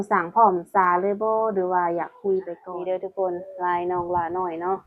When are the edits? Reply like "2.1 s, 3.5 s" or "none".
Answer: 2.6 s